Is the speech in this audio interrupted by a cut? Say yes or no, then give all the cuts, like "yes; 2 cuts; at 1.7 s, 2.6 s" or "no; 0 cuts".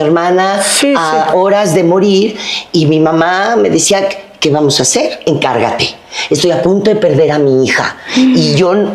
no; 0 cuts